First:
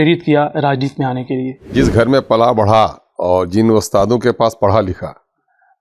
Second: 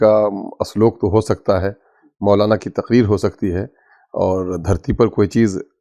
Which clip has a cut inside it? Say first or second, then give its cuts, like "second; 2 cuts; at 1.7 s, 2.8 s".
first; 2 cuts; at 1.7 s, 3.1 s